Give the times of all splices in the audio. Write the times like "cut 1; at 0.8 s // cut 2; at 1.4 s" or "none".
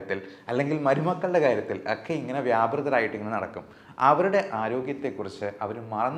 none